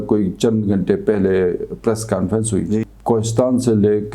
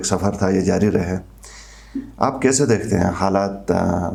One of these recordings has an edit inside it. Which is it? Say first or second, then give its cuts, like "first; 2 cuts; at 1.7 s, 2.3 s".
first; 1 cut; at 2.8 s